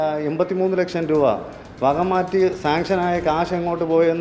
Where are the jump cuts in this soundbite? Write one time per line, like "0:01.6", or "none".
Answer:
none